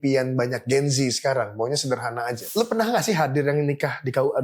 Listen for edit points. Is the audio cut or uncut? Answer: cut